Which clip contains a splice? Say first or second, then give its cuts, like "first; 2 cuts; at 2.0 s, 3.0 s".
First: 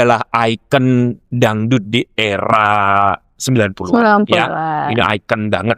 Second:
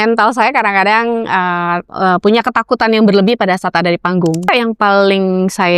second; 2 cuts; at 1.9 s, 4.5 s